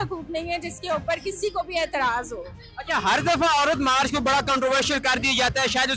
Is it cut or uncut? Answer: uncut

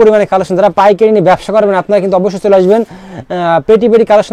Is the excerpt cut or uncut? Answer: uncut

